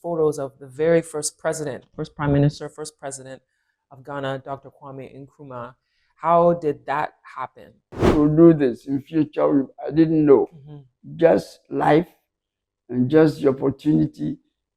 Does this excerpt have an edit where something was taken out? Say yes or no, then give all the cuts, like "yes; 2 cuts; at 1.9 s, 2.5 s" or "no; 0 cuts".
yes; 1 cut; at 8.0 s